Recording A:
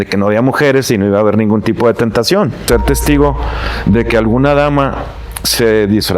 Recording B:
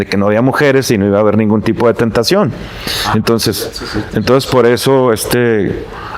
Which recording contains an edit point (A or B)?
A